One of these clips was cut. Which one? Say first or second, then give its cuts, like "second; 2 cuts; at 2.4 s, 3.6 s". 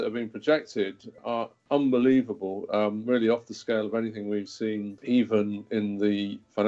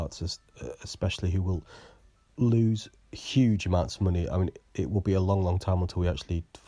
first; 2 cuts; at 1.1 s, 4.9 s